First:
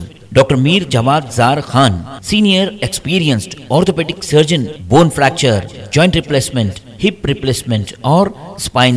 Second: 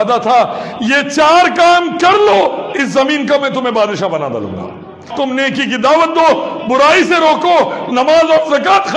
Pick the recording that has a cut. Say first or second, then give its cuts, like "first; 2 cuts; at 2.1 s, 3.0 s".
second; 1 cut; at 5.0 s